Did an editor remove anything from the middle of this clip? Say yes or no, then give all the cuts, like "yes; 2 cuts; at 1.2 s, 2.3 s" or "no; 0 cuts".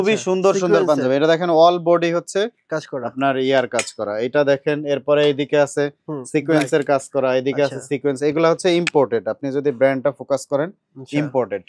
no; 0 cuts